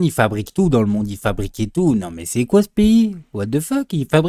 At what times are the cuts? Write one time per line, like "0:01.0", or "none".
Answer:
none